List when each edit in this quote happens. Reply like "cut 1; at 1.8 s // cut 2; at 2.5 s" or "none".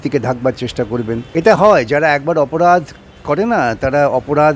cut 1; at 1.2 s